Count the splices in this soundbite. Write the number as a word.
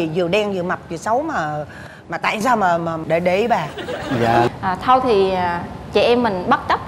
one